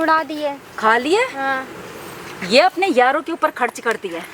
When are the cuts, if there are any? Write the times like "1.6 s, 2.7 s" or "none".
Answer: none